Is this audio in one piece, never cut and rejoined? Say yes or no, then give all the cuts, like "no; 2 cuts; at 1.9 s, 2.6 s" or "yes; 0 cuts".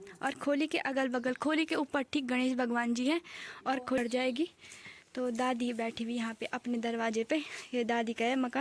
no; 1 cut; at 4.0 s